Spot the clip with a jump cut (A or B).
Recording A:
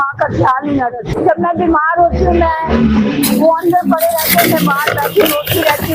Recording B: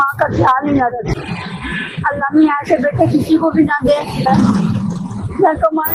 B